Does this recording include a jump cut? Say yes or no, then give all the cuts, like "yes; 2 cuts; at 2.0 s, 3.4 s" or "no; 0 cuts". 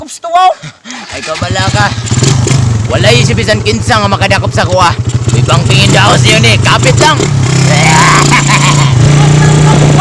yes; 1 cut; at 9.0 s